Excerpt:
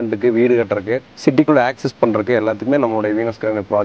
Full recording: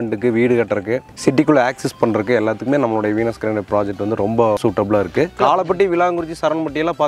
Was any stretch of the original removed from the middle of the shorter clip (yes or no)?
no